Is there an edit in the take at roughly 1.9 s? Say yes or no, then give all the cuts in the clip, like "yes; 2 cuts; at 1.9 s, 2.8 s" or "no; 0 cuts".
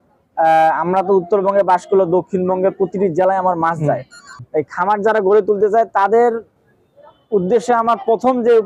no; 1 cut; at 4.5 s